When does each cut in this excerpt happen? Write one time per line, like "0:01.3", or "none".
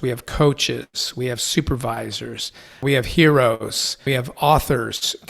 0:02.8
0:04.0